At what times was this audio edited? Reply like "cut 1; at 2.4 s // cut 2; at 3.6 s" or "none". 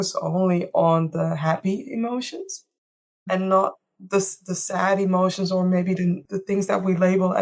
cut 1; at 6.3 s